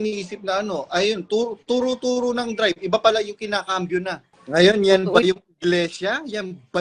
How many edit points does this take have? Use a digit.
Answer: 1